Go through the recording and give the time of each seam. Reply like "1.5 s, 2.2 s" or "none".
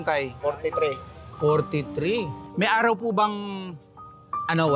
2.4 s